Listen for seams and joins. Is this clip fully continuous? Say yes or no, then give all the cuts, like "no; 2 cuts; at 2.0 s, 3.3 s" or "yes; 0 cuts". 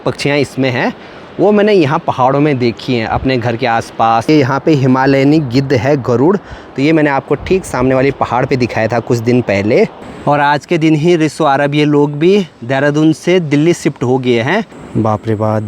no; 3 cuts; at 4.3 s, 10.0 s, 14.8 s